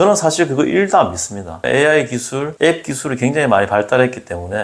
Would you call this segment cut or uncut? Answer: cut